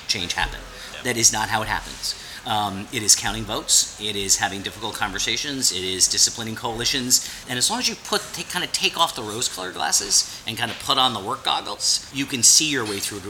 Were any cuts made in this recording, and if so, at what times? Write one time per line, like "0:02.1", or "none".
0:07.4
0:12.1